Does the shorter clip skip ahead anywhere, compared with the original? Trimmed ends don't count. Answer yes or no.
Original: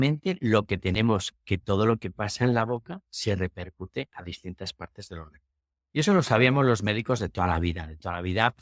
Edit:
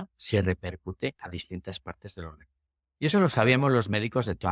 no